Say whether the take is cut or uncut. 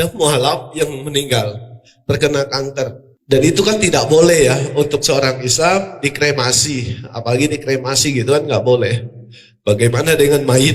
cut